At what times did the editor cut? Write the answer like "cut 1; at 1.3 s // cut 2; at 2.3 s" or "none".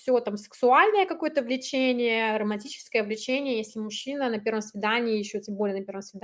none